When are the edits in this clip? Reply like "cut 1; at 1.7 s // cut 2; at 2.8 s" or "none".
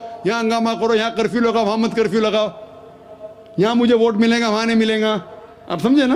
none